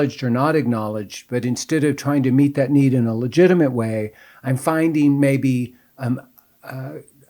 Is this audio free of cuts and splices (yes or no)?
yes